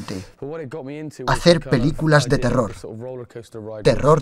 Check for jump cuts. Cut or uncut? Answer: uncut